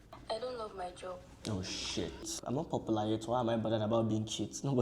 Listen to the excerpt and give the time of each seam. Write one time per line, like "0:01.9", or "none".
0:02.4